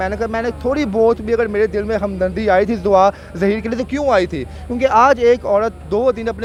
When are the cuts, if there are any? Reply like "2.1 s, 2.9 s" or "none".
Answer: none